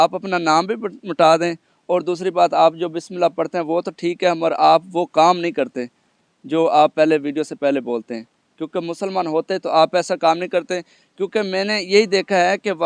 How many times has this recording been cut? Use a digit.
0